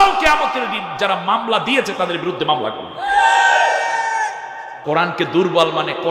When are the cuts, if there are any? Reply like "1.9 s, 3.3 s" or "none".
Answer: 4.7 s